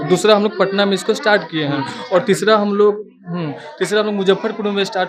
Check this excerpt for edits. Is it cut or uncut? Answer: uncut